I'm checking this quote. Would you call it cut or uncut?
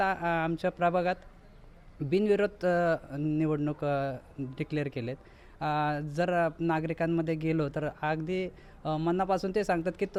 uncut